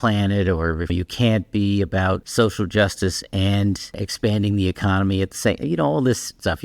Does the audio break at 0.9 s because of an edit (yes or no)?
yes